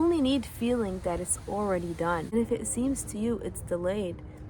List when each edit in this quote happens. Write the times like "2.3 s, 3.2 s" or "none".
2.3 s

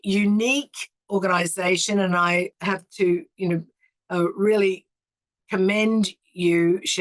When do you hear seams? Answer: 1.0 s, 2.5 s

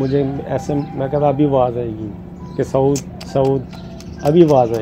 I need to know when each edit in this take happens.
none

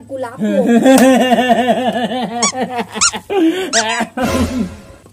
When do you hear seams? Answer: none

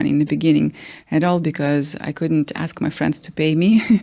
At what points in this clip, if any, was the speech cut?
none

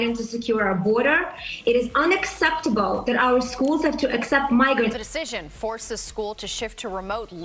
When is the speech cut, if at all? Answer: none

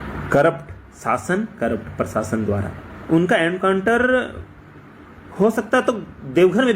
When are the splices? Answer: 3.0 s

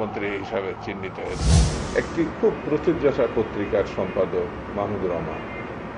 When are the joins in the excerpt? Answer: 1.7 s

